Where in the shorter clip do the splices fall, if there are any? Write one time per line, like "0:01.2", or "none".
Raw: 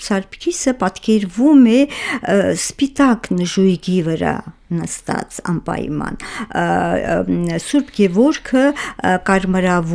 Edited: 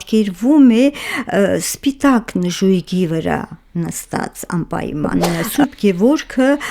0:05.1